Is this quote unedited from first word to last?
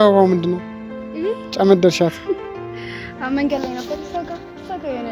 yes; 0 cuts

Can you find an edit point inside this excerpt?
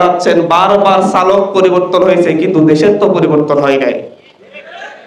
no; 0 cuts

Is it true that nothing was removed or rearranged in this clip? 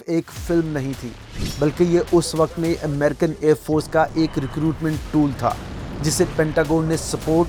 yes; 0 cuts

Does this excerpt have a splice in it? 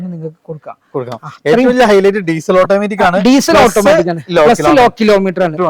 no; 0 cuts

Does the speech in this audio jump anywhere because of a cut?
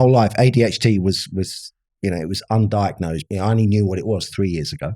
yes; 1 cut; at 3.2 s

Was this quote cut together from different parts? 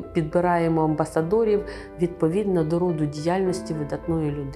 no; 0 cuts

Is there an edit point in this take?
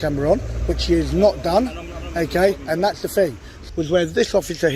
yes; 1 cut; at 3.6 s

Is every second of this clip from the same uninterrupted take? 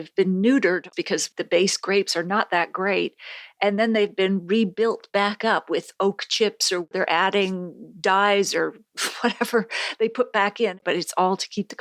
no; 3 cuts; at 1.0 s, 6.9 s, 10.8 s

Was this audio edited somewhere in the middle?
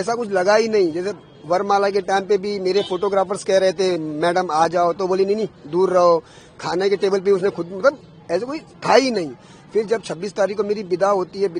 no; 0 cuts

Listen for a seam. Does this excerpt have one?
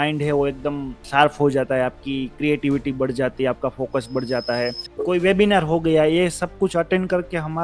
yes; 2 cuts; at 1.0 s, 4.8 s

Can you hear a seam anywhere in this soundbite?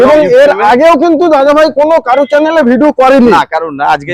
no; 0 cuts

